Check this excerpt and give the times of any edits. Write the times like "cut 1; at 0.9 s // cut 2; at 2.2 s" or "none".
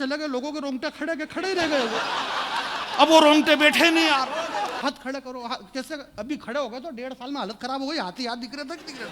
cut 1; at 4.8 s